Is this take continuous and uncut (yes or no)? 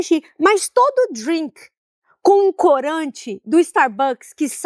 yes